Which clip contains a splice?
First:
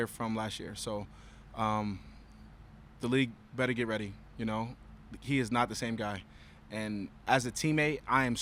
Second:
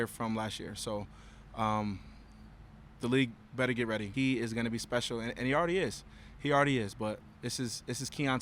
second; 1 cut; at 4.1 s

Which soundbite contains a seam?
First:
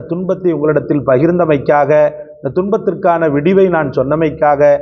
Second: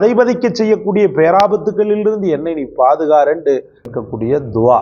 second; 1 cut; at 3.9 s

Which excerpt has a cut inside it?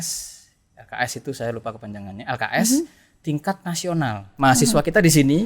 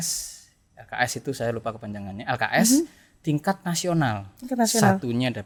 first; 1 cut; at 4.3 s

